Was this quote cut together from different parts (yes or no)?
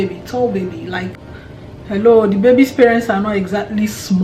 yes